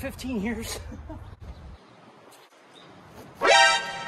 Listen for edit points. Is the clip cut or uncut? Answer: cut